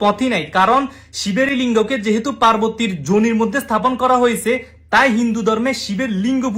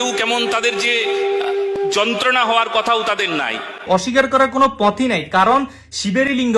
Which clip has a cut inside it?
second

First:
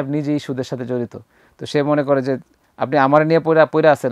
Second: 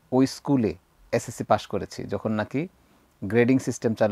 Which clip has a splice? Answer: second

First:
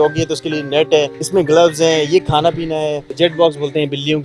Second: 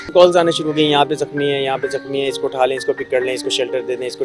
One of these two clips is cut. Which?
first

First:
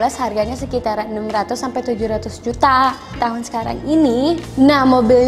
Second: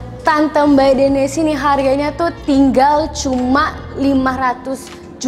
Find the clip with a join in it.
first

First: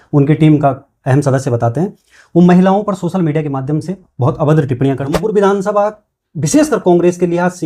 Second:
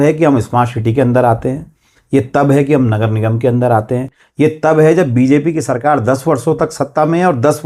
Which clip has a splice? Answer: first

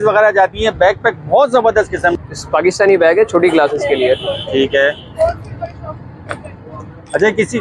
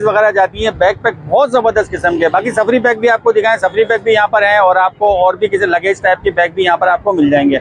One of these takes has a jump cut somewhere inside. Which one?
first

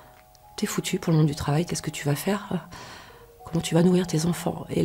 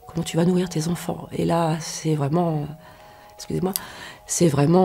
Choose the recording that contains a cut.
first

